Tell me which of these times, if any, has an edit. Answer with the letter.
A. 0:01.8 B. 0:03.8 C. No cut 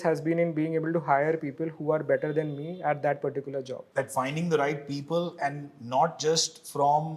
B